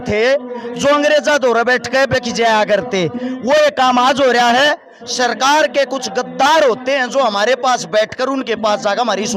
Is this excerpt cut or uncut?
uncut